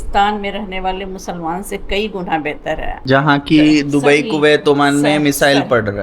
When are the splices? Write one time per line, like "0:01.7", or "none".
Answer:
0:03.0

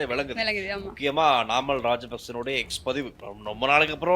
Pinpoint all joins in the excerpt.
0:03.2

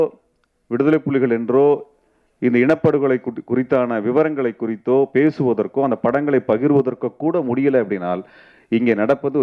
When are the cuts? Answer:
none

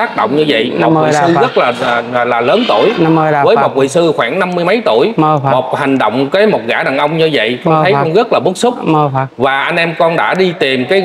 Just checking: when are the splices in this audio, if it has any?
none

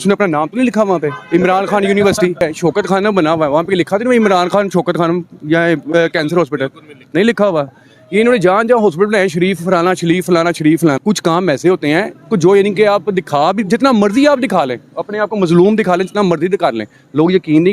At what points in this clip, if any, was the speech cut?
0:02.4
0:11.0

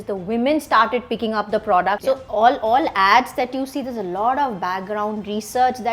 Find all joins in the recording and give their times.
0:02.0

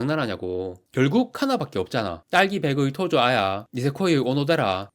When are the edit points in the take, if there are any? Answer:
0:02.2

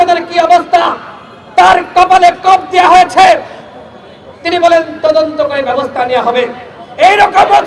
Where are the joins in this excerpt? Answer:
none

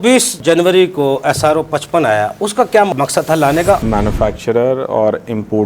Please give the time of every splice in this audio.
0:03.8

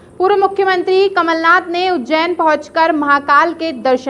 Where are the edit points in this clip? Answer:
none

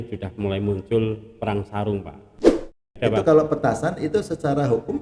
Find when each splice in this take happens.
0:02.6

